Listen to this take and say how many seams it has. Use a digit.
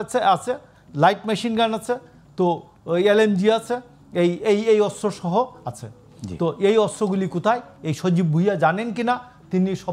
0